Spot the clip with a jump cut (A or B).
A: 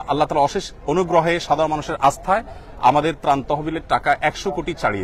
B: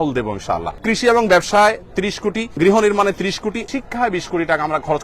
B